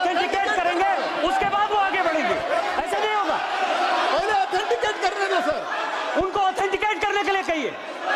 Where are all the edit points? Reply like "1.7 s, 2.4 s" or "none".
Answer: none